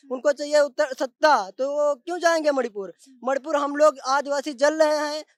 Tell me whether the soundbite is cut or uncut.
uncut